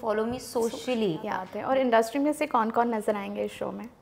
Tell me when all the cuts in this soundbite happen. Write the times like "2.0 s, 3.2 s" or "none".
1.5 s

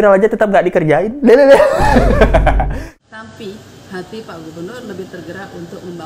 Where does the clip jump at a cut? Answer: 2.9 s

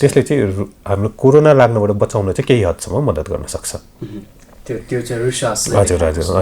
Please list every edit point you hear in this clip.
none

